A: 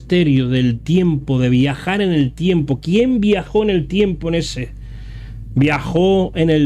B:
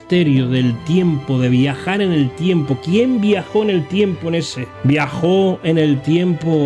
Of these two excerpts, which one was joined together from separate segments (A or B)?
B